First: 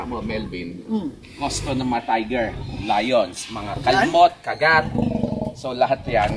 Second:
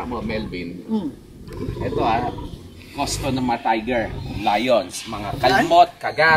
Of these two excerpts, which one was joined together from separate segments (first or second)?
first